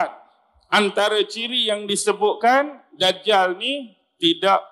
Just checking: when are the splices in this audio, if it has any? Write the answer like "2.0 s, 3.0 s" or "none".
none